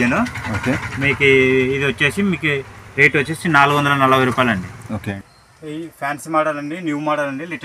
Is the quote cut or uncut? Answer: cut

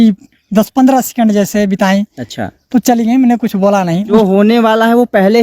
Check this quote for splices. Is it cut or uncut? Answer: cut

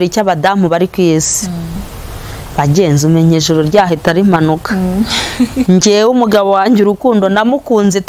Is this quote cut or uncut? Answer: uncut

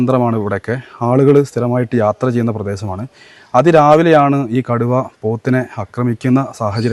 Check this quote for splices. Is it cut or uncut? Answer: uncut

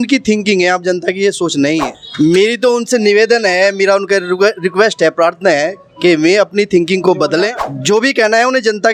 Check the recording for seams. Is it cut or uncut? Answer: uncut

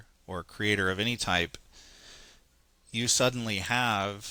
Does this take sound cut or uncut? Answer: uncut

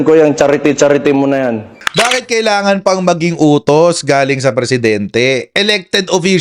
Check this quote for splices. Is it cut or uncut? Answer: cut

